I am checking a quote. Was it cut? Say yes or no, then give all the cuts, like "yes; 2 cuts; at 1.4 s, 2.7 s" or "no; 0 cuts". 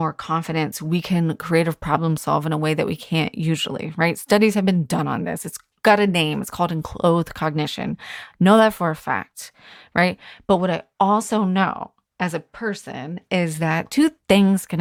no; 0 cuts